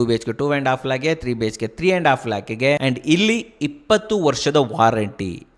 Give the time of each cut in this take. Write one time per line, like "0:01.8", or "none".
0:02.8